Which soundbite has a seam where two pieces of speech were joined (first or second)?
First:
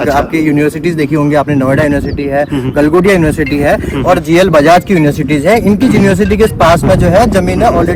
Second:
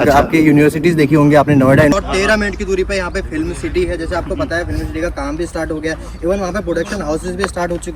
second